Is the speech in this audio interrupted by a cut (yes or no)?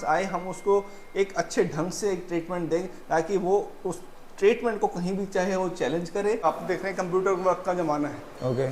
yes